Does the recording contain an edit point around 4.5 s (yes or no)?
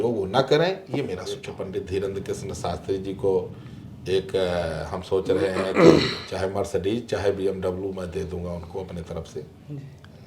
no